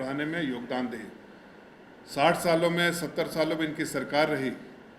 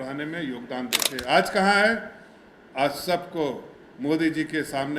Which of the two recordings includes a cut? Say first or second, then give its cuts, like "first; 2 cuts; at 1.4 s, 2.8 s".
second; 1 cut; at 1.1 s